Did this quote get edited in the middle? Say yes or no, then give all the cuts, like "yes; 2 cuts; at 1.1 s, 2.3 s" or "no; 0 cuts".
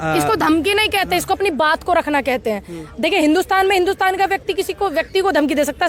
no; 0 cuts